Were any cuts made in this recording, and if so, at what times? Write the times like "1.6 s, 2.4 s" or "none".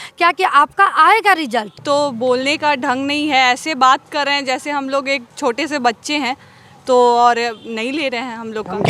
1.8 s